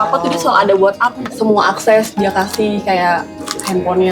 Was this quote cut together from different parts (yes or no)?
yes